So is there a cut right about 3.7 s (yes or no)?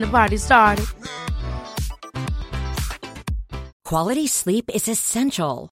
yes